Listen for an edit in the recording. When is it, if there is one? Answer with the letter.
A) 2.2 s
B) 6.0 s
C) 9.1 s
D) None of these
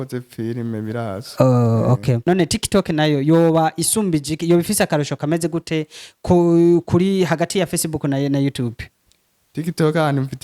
A